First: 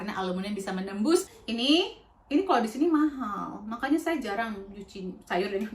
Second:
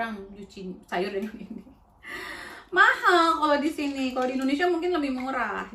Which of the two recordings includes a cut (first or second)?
first